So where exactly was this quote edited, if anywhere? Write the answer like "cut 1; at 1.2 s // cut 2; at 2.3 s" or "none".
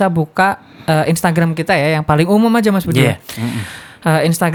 none